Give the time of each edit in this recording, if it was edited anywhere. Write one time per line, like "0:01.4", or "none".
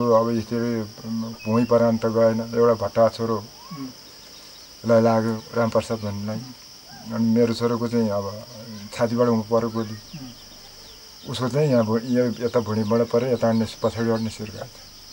none